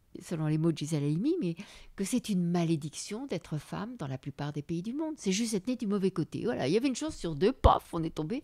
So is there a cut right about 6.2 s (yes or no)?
no